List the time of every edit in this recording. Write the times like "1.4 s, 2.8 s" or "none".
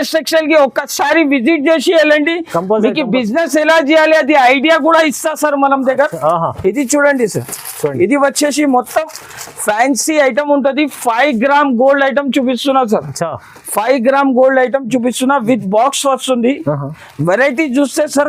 none